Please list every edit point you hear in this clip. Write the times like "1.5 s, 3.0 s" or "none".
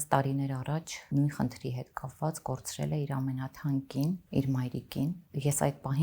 1.1 s, 4.2 s, 5.2 s